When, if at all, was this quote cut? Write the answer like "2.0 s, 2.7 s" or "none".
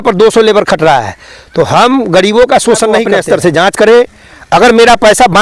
3.0 s